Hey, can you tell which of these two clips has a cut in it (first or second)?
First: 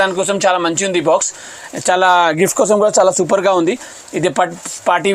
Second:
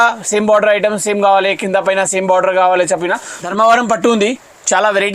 second